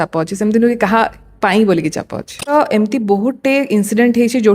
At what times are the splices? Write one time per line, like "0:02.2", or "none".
0:02.5